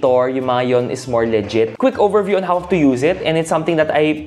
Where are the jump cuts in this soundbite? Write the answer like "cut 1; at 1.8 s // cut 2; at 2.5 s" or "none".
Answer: cut 1; at 1.7 s